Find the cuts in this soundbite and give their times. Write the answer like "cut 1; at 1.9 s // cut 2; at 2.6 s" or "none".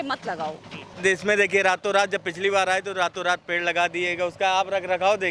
cut 1; at 0.9 s